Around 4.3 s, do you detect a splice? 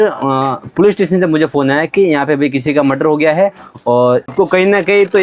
yes; 1 cut; at 4.3 s

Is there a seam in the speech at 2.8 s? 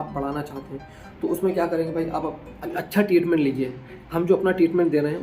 yes; 1 cut; at 2.8 s

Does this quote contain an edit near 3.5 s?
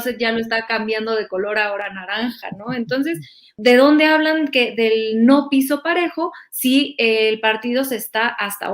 yes; 1 cut; at 3.5 s

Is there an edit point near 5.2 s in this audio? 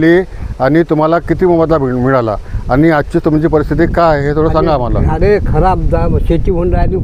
no; 0 cuts

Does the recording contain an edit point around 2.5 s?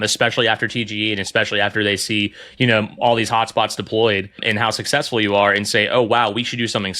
no; 1 cut; at 4.5 s

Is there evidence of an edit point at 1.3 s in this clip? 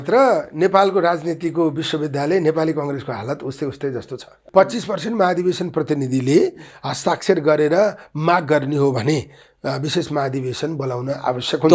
no; 1 cut; at 4.4 s

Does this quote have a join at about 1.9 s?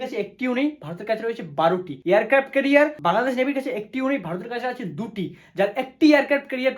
yes; 2 cuts; at 1.9 s, 3.0 s

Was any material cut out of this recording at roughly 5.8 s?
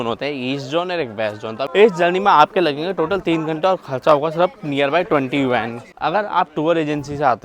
yes; 2 cuts; at 1.7 s, 5.8 s

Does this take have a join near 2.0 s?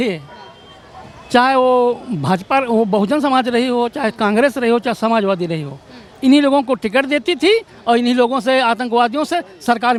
no; 0 cuts

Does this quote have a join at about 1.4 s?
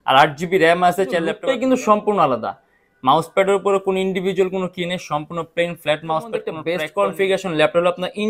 yes; 2 cuts; at 1.4 s, 6.6 s

